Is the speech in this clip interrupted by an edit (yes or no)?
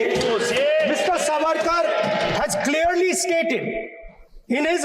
no